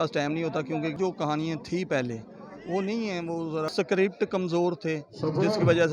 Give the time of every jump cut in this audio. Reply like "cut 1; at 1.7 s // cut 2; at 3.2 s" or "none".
cut 1; at 0.9 s // cut 2; at 3.7 s